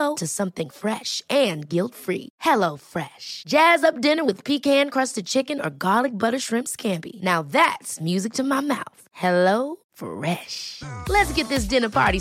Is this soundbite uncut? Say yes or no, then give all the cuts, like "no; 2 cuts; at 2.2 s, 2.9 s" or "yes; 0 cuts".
yes; 0 cuts